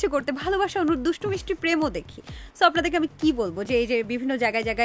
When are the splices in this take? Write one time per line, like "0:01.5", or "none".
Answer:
none